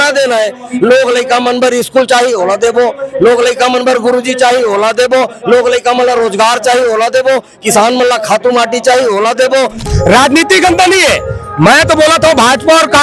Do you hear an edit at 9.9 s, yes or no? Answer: yes